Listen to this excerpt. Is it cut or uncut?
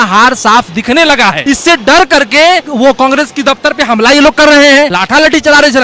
cut